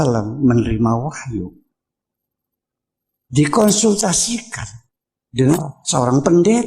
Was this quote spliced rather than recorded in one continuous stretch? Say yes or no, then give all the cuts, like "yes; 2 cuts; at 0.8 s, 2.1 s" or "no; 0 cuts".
yes; 1 cut; at 5.4 s